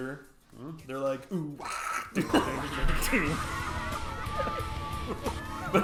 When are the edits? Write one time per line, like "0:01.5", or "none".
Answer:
none